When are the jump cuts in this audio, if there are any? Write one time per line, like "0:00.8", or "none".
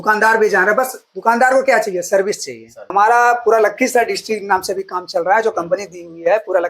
0:02.9